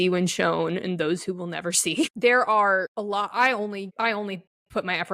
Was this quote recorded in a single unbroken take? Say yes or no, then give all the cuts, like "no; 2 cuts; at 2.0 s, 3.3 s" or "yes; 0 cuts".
no; 3 cuts; at 2.1 s, 2.9 s, 3.9 s